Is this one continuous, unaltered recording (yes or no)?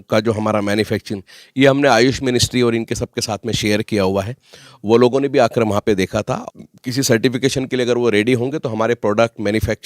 no